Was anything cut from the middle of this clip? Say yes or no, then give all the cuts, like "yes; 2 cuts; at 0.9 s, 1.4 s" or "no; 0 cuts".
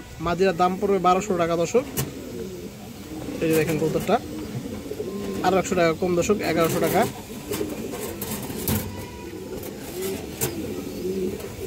no; 0 cuts